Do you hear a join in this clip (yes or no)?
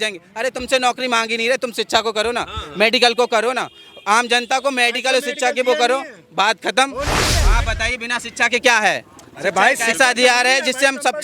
yes